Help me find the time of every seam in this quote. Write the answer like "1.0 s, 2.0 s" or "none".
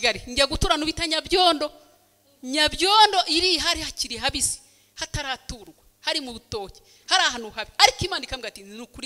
none

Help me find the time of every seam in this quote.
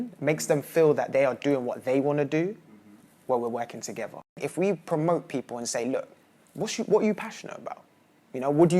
4.4 s

